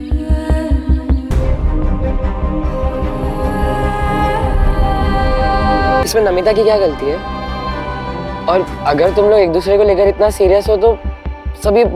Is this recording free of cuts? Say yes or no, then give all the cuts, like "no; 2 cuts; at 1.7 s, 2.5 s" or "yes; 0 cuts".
no; 2 cuts; at 1.3 s, 6.0 s